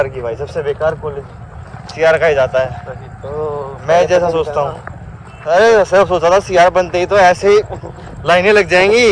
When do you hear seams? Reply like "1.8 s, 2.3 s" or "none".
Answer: none